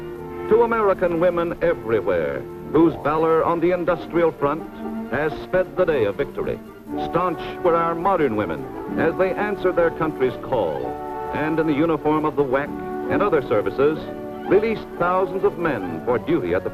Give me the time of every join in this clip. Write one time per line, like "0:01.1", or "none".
none